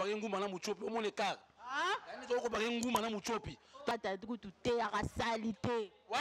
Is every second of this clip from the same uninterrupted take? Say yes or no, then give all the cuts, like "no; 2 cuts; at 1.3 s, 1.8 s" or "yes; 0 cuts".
no; 1 cut; at 3.9 s